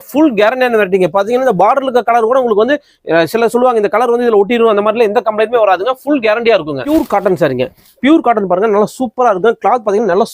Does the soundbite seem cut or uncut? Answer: uncut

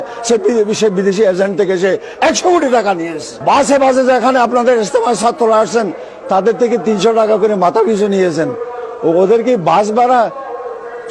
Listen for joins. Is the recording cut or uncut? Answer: cut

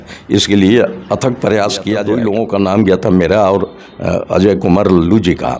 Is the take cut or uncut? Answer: cut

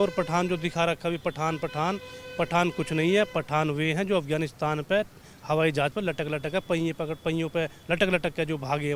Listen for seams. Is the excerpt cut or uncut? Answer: uncut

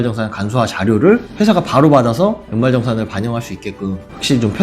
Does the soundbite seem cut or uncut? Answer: uncut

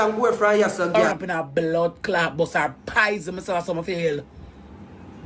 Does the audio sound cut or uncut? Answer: cut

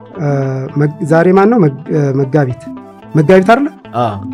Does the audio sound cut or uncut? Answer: uncut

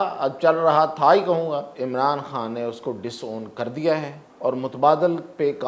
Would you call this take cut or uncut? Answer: cut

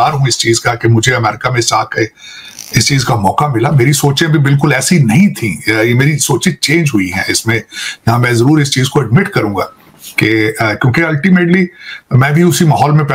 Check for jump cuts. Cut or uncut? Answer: uncut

